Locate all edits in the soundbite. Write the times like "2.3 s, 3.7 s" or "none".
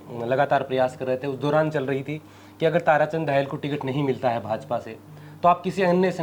none